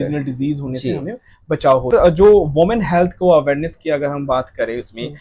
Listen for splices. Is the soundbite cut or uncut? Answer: cut